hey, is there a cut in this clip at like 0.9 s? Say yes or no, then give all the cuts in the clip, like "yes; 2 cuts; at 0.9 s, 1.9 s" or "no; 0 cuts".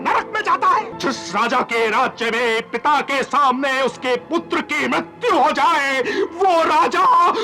yes; 1 cut; at 0.9 s